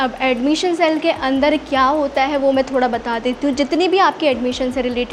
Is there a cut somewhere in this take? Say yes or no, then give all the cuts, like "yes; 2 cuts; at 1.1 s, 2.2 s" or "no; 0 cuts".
no; 0 cuts